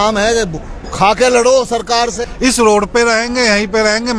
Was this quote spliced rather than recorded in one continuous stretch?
yes; 1 cut; at 2.2 s

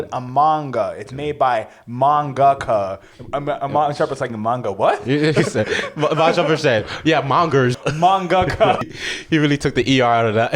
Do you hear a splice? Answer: yes; 2 cuts; at 7.8 s, 8.8 s

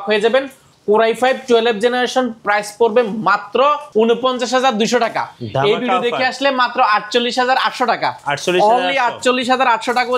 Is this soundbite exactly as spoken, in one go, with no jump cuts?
yes; 0 cuts

